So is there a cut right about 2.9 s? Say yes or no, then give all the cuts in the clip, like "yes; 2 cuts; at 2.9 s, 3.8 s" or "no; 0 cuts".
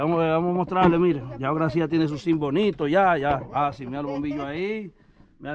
no; 0 cuts